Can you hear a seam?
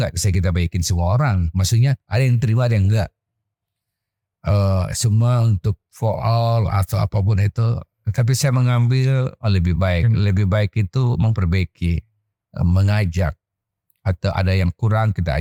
no; 0 cuts

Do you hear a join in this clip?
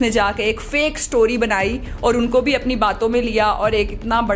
no; 0 cuts

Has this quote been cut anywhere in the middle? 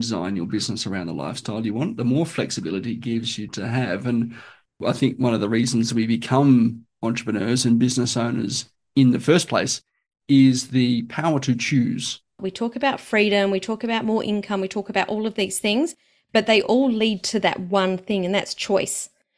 yes; 3 cuts; at 3.4 s, 4.8 s, 12.4 s

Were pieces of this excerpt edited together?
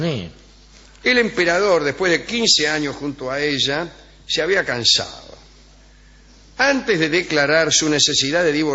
yes; 1 cut; at 4.9 s

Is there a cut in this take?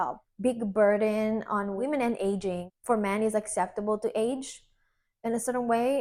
no; 0 cuts

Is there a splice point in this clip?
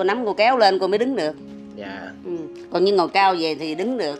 no; 0 cuts

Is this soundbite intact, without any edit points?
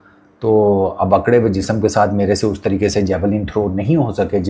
yes; 0 cuts

